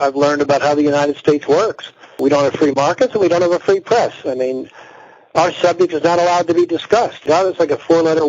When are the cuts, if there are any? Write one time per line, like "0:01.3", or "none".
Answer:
0:02.2